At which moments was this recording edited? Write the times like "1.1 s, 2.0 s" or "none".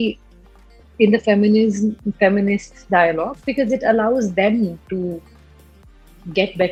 none